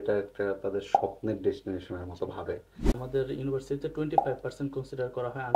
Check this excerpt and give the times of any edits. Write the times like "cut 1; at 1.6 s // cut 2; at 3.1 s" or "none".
cut 1; at 2.9 s